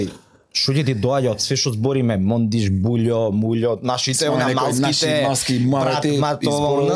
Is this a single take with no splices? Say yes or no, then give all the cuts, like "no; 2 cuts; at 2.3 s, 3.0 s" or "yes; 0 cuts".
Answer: yes; 0 cuts